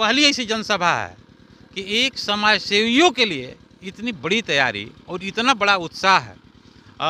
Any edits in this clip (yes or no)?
no